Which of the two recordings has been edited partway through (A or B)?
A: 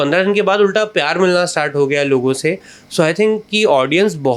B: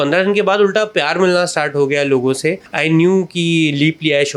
B